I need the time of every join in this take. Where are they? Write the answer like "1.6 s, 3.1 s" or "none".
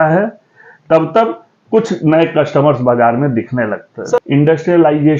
4.2 s